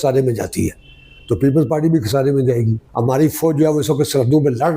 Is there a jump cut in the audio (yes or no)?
yes